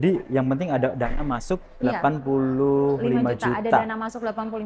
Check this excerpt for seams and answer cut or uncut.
uncut